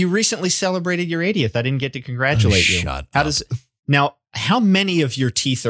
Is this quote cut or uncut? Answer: uncut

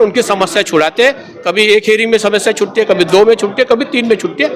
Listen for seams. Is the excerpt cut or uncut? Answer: uncut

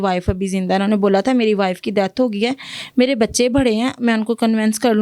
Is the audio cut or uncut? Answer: uncut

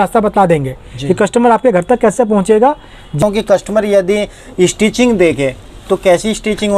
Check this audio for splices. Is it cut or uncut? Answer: cut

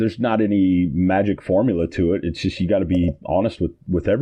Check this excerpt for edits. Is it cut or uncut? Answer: uncut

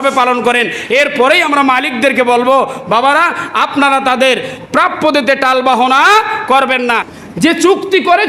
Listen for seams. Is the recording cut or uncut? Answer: cut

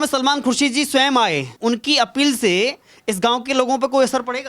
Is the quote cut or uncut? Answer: cut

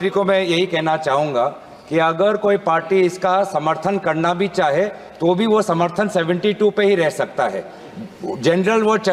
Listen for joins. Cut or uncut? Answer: uncut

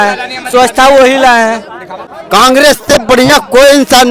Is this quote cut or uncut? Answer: cut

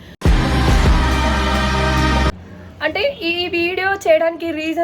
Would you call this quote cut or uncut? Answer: cut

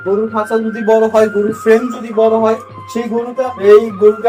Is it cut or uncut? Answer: cut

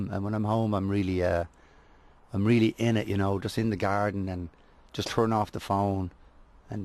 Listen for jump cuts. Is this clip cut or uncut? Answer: uncut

